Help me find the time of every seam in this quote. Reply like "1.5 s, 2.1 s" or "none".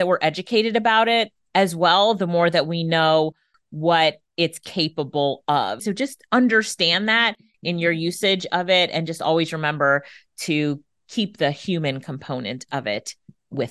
5.9 s